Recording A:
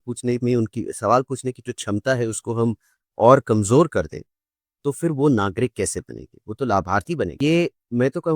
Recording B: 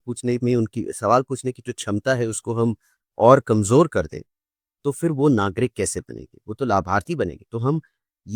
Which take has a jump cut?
A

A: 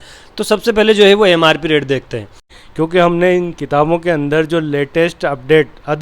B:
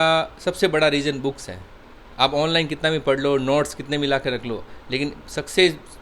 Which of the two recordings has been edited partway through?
A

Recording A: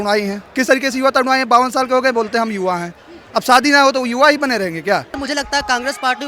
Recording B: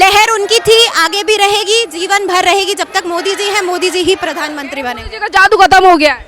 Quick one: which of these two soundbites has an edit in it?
A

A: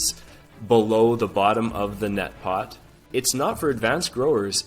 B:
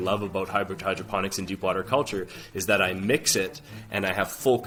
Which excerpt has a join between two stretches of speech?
A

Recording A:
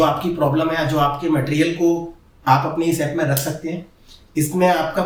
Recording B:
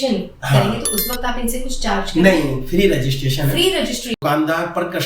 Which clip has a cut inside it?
B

